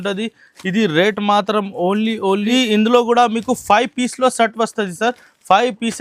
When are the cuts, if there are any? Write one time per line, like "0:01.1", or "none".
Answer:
0:02.5